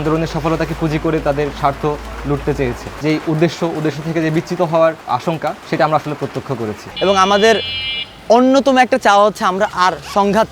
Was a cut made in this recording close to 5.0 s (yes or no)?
no